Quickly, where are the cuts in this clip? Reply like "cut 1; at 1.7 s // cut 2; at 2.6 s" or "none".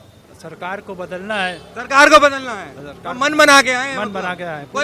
none

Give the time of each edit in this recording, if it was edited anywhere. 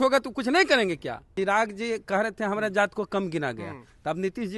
cut 1; at 1.2 s

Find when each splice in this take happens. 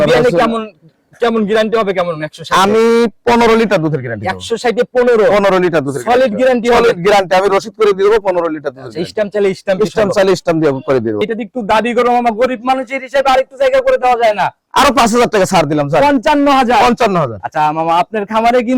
cut 1; at 11.2 s

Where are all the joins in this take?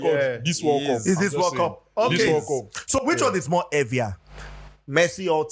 none

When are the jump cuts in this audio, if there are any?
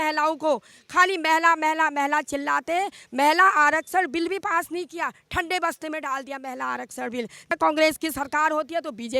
cut 1; at 7.5 s

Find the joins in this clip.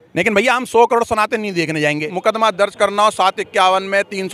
cut 1; at 2.1 s

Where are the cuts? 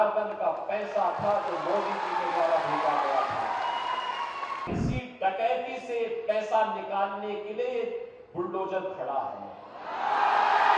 cut 1; at 4.7 s

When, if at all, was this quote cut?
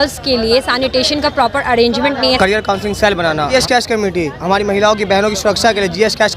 cut 1; at 2.4 s // cut 2; at 3.5 s

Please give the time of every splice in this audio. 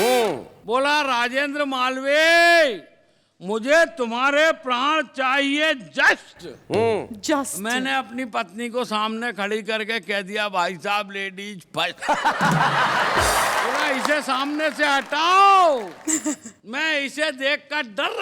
cut 1; at 13.8 s

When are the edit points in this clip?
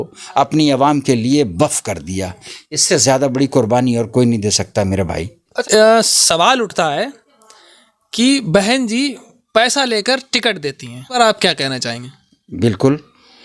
cut 1; at 5.5 s // cut 2; at 11.2 s

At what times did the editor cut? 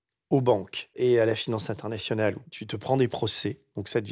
cut 1; at 1.0 s // cut 2; at 2.5 s

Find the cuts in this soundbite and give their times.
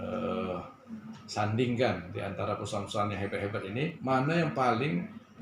cut 1; at 4.0 s

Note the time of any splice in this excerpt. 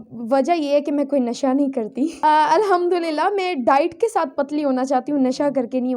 cut 1; at 2.1 s

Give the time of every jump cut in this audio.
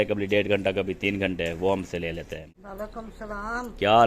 cut 1; at 2.6 s

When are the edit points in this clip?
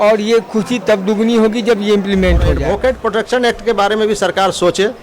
cut 1; at 2.6 s

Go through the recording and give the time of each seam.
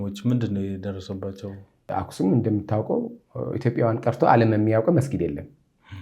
cut 1; at 1.9 s

